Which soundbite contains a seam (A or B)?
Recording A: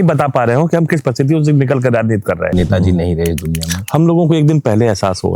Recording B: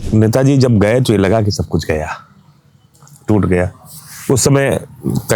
A